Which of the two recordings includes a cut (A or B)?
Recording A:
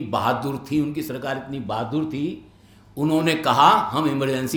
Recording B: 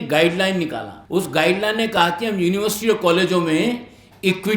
B